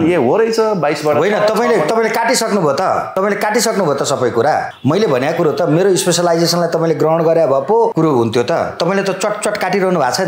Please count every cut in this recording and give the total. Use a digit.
3